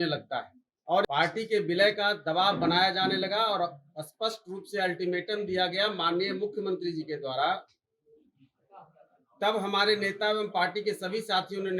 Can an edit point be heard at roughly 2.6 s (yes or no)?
no